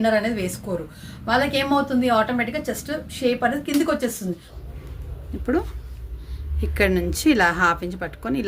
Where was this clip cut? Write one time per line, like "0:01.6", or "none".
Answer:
0:04.5

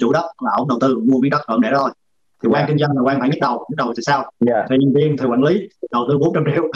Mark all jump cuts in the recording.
none

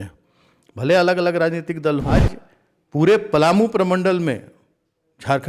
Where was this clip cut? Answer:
0:02.1

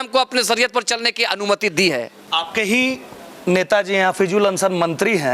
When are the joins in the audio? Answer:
0:02.2

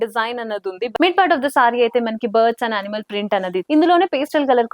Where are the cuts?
0:00.9
0:03.7

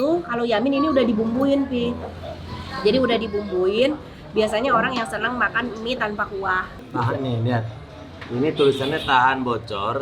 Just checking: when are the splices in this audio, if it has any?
0:06.8

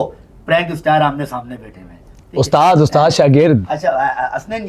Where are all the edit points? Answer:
none

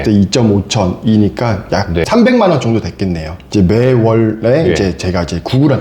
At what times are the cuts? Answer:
0:02.0
0:03.3

